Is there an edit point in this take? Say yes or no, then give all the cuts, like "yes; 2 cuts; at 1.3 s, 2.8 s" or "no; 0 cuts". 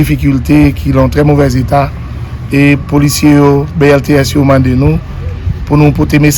no; 0 cuts